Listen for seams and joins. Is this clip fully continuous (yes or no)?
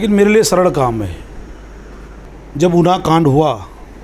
no